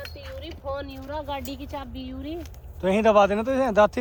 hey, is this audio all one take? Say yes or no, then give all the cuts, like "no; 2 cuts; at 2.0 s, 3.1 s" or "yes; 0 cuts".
yes; 0 cuts